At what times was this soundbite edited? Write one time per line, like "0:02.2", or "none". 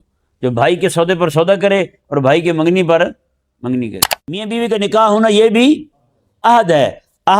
0:04.5